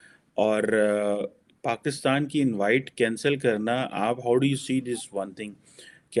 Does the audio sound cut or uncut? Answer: uncut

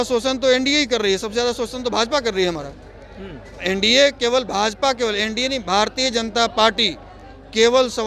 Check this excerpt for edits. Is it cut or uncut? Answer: uncut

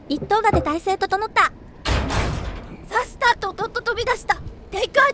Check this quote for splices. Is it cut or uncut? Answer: uncut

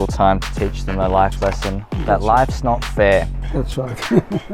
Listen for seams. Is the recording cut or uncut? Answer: uncut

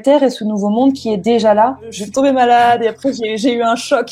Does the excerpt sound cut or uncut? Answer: cut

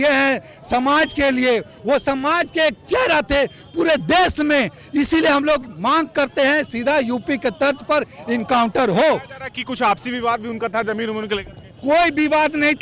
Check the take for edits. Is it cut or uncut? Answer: uncut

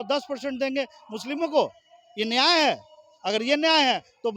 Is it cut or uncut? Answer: uncut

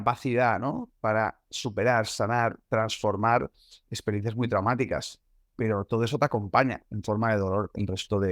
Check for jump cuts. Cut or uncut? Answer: uncut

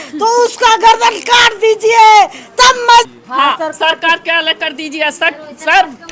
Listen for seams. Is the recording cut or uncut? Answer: cut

